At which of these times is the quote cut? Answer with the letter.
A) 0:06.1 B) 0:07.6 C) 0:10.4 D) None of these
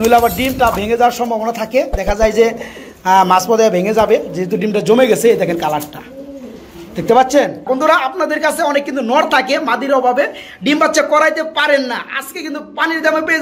B